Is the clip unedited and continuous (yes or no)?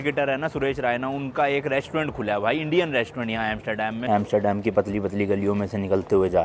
no